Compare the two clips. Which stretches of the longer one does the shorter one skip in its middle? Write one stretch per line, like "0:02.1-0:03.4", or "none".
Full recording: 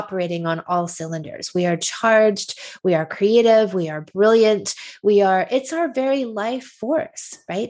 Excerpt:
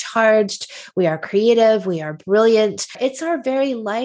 0:04.8-0:05.5